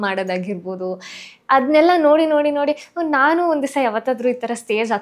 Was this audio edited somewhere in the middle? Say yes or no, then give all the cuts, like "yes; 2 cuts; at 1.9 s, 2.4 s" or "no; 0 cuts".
no; 0 cuts